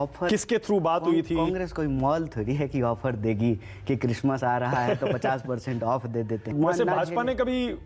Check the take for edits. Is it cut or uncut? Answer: cut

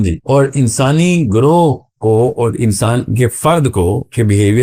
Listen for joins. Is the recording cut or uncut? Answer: uncut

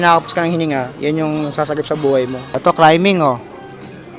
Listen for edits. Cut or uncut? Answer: cut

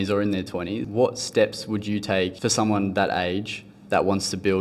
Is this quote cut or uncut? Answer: cut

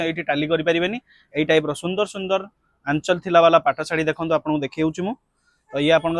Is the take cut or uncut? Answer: uncut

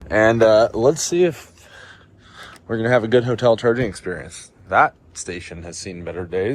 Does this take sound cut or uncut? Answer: uncut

